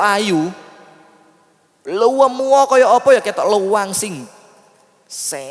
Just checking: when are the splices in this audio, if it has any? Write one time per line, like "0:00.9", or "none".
none